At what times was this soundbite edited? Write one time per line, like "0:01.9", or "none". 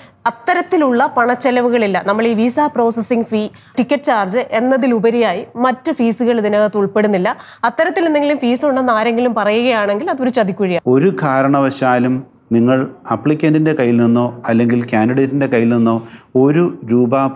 0:03.7
0:10.8

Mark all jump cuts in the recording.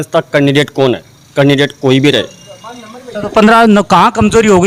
none

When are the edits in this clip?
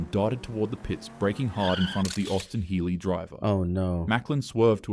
none

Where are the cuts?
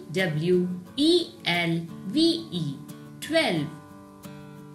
0:03.8

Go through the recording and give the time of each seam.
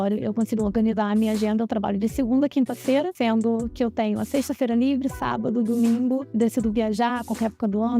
0:03.1

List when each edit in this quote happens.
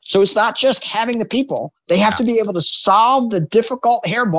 none

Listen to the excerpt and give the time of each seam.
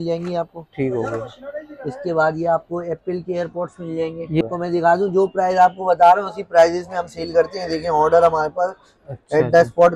0:04.4

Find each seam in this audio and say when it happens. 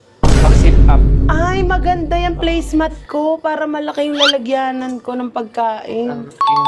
none

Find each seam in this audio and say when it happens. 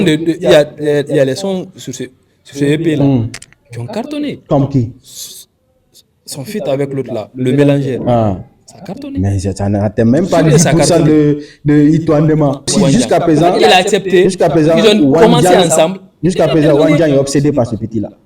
0:12.7

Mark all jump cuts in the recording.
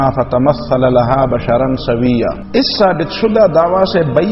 0:02.4

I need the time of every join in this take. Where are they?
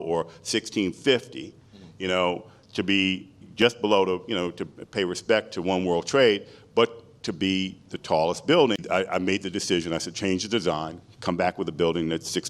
0:08.8

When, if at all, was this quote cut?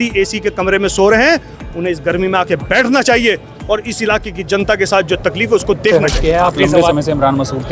0:05.9

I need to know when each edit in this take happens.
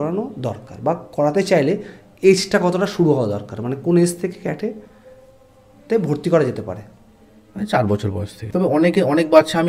0:08.4

